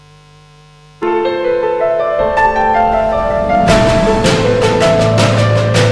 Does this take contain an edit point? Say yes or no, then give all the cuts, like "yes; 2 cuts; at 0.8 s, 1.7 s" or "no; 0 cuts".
yes; 1 cut; at 1.0 s